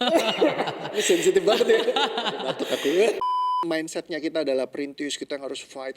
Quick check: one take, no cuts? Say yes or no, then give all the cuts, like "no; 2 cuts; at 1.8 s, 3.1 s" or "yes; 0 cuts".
no; 1 cut; at 3.4 s